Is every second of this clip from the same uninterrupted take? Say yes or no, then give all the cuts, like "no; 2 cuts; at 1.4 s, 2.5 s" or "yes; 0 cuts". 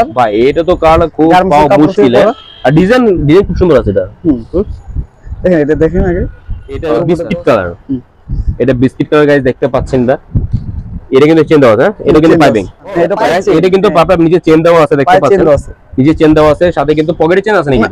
no; 2 cuts; at 7.2 s, 13.3 s